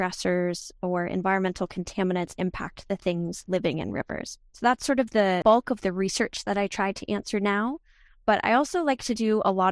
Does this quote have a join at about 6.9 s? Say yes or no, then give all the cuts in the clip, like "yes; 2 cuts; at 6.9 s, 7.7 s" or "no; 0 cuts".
no; 1 cut; at 5.4 s